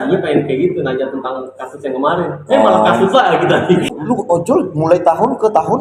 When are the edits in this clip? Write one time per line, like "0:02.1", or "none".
0:03.9